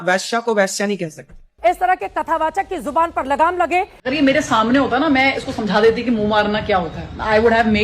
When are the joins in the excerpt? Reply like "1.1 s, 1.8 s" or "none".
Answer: 1.2 s, 4.0 s